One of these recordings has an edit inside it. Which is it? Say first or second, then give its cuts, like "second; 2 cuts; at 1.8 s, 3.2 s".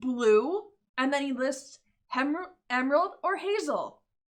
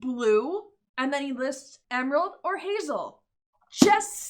second; 1 cut; at 1.8 s